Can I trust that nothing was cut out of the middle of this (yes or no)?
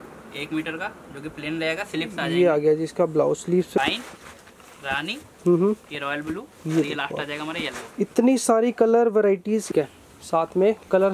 no